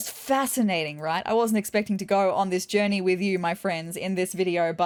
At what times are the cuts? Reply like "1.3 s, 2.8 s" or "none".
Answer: none